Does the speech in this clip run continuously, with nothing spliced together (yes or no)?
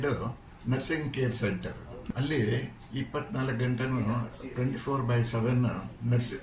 no